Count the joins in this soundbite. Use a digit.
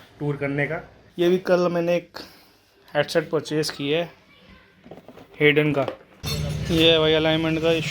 2